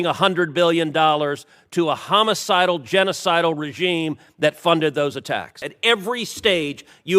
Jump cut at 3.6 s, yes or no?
no